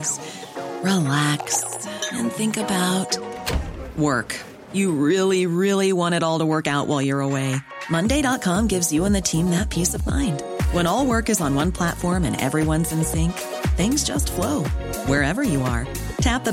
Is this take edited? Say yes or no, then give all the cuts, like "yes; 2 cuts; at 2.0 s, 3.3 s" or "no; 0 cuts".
no; 0 cuts